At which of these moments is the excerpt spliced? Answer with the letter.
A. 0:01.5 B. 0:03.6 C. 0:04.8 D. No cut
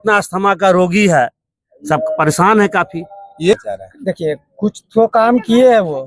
B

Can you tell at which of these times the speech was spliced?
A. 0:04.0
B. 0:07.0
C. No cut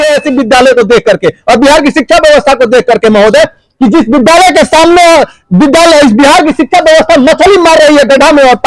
C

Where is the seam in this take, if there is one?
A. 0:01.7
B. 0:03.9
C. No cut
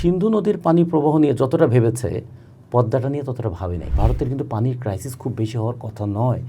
B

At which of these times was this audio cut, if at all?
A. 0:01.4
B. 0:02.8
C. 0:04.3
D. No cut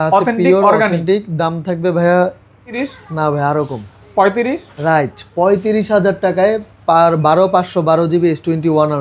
B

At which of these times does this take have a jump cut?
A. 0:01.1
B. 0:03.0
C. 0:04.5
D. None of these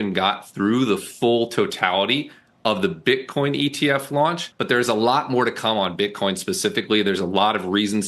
C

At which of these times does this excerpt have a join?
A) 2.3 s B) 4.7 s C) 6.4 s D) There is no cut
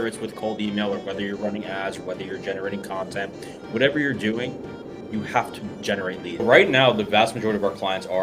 C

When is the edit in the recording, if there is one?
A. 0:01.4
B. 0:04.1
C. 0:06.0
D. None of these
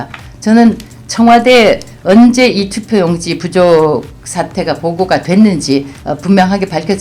C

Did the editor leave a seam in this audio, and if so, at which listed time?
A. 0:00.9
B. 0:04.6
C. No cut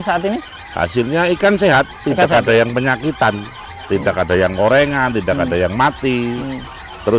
C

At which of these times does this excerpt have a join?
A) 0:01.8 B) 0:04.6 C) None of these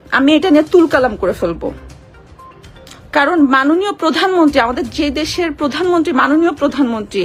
C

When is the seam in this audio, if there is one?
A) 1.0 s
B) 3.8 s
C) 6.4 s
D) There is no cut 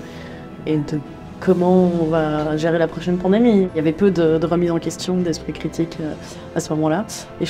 B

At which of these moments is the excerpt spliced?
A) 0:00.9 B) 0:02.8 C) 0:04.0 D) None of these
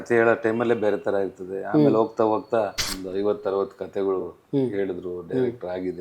B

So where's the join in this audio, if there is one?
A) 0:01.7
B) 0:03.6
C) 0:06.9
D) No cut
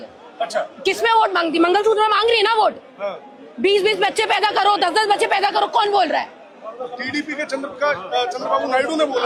D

